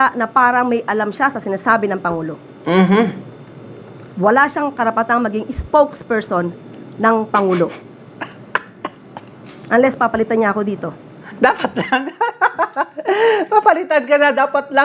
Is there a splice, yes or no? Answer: no